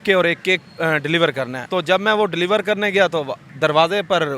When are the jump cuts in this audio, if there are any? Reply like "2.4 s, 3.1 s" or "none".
1.6 s, 3.4 s